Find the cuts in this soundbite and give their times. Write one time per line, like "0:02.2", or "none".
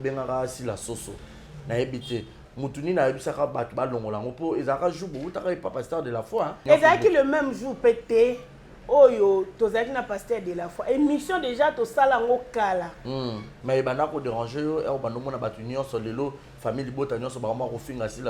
0:06.6
0:13.5